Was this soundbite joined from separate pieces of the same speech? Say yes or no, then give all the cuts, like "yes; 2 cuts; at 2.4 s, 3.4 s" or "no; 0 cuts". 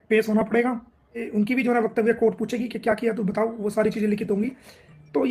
yes; 1 cut; at 1.3 s